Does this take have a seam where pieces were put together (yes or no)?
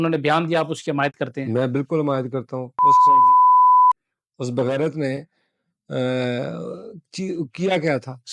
no